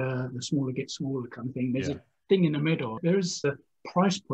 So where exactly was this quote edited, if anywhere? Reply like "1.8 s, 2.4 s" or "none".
3.4 s